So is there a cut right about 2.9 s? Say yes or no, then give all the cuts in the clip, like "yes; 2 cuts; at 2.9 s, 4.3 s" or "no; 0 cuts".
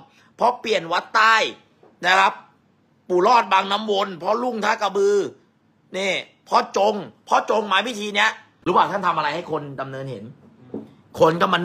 no; 1 cut; at 8.5 s